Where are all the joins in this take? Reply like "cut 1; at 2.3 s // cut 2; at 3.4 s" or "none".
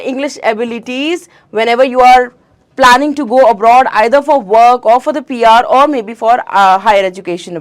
none